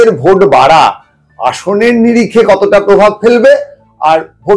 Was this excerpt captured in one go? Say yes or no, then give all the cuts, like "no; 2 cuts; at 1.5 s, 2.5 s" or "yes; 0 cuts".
yes; 0 cuts